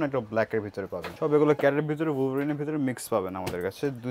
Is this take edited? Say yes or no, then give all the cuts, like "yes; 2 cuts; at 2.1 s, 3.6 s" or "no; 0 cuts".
yes; 1 cut; at 1.1 s